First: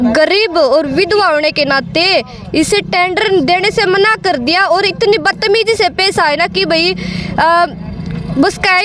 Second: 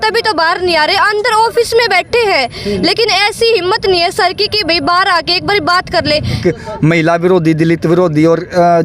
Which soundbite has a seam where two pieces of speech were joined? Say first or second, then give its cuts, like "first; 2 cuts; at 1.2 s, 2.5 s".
second; 1 cut; at 6.4 s